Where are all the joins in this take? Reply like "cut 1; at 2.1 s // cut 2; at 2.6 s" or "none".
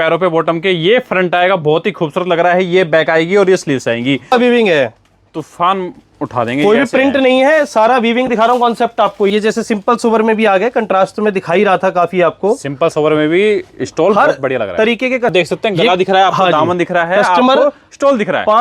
cut 1; at 4.3 s // cut 2; at 9.3 s // cut 3; at 15.3 s